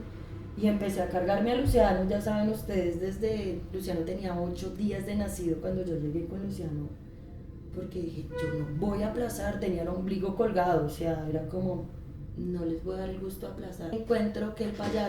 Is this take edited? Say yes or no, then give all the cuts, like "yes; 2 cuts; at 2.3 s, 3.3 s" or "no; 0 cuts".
yes; 1 cut; at 13.9 s